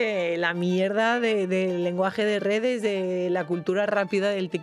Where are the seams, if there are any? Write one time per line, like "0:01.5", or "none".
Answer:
none